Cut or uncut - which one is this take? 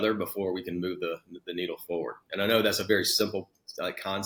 uncut